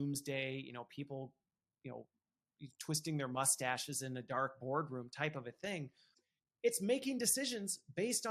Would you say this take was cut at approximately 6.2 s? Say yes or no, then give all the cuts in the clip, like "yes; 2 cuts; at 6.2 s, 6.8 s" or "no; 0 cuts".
yes; 1 cut; at 6.2 s